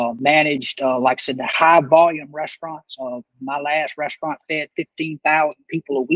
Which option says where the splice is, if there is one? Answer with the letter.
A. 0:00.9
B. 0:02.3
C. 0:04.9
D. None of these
D